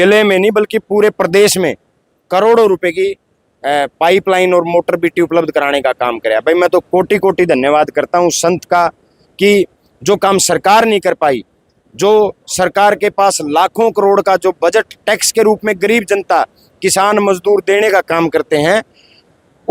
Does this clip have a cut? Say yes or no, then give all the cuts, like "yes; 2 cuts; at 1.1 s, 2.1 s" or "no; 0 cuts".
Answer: no; 0 cuts